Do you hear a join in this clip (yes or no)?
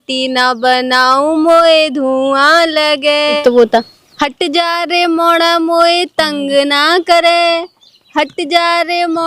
no